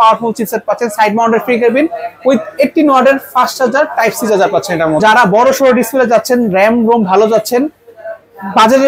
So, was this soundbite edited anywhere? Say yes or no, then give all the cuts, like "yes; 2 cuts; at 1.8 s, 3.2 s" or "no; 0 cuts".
yes; 1 cut; at 5.0 s